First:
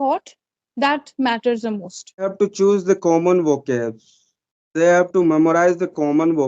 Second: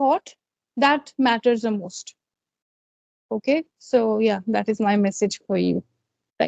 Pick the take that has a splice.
first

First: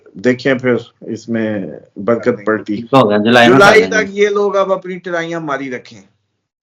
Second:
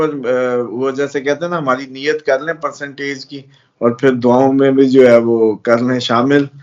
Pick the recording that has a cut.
first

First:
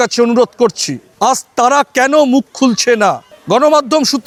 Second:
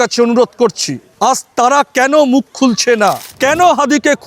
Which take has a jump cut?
second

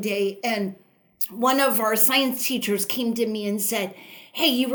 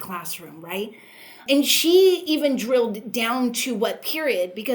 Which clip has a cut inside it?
second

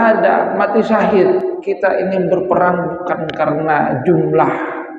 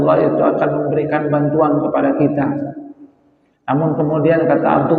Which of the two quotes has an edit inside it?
first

